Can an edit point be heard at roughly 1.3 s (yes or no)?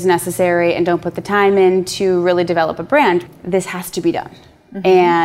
no